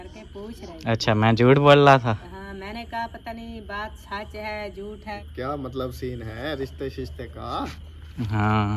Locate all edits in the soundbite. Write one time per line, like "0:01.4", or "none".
0:05.3